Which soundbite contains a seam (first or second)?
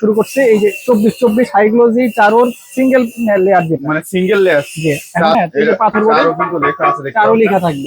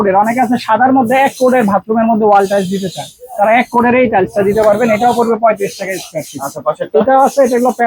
first